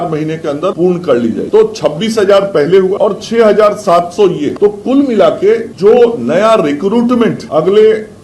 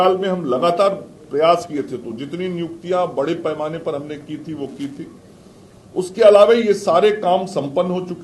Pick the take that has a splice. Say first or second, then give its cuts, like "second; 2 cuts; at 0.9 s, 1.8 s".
first; 6 cuts; at 0.7 s, 1.5 s, 2.9 s, 4.5 s, 5.7 s, 7.4 s